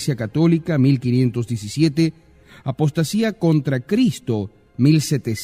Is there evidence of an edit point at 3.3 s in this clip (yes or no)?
yes